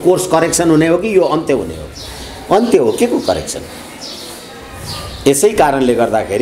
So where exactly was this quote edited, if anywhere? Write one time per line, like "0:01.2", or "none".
none